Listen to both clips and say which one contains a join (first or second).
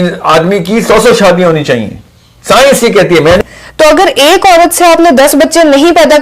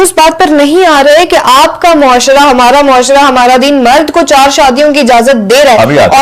first